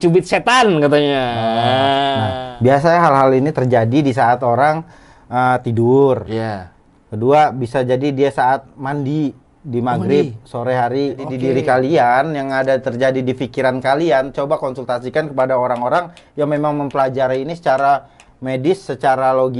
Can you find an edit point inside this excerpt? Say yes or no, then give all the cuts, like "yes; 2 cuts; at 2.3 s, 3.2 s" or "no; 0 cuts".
yes; 2 cuts; at 2.3 s, 11.3 s